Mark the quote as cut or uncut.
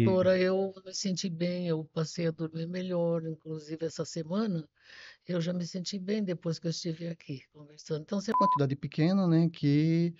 cut